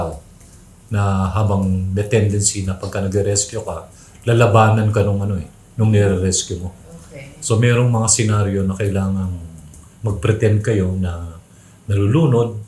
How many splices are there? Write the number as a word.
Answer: zero